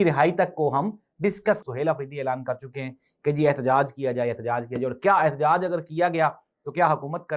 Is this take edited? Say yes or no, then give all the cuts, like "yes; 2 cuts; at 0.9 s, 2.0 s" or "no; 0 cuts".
yes; 1 cut; at 1.6 s